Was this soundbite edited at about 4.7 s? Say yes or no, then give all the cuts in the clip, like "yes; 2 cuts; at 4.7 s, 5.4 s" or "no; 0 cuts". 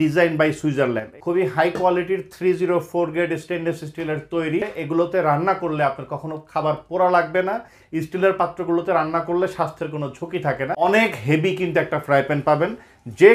yes; 4 cuts; at 1.1 s, 4.7 s, 7.8 s, 10.7 s